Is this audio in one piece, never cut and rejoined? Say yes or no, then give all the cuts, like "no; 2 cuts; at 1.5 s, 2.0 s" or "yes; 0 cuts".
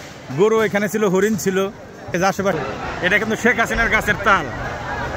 no; 1 cut; at 2.5 s